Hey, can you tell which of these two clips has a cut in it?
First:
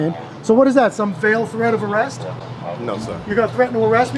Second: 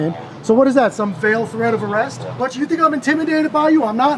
second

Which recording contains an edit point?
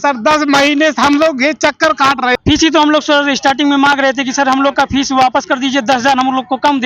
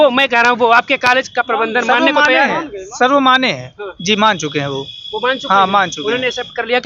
first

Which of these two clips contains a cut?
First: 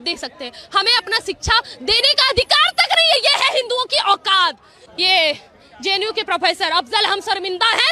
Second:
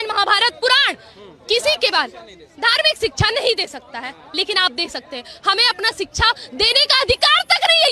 first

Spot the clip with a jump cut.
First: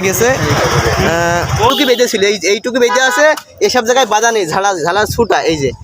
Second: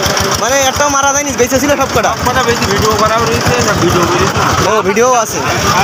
first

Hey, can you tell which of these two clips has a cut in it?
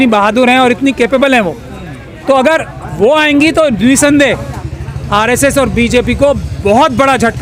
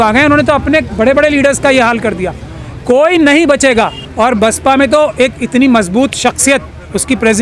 second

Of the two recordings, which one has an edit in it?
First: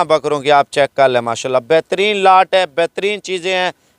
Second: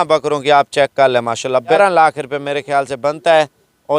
second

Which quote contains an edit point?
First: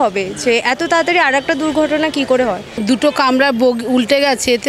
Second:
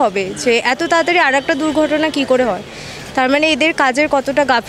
first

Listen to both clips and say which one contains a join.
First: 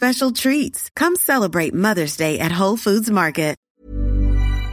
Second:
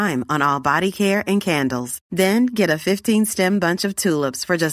first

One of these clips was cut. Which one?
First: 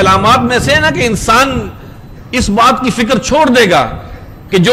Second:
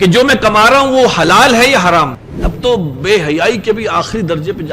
second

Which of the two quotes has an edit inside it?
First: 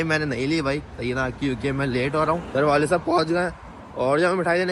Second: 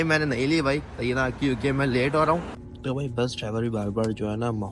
second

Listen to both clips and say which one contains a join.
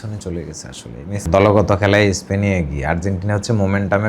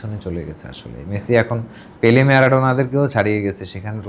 first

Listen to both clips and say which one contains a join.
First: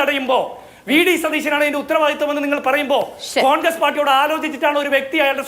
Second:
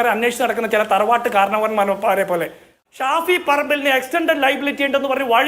second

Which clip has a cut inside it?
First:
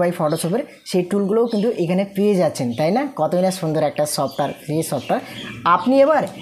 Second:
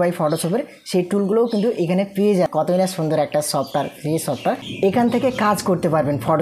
second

